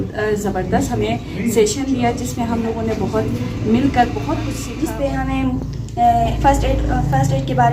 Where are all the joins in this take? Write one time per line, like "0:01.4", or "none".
0:04.6